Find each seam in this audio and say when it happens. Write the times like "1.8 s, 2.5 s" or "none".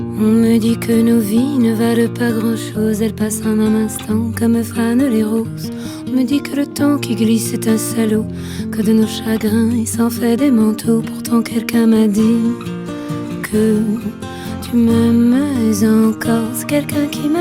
none